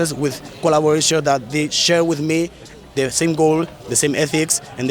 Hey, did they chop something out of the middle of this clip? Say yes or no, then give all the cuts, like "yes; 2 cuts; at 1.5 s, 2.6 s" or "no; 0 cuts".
no; 0 cuts